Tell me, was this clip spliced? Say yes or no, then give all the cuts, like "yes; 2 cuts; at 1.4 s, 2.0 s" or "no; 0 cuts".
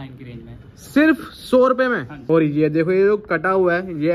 yes; 1 cut; at 2.1 s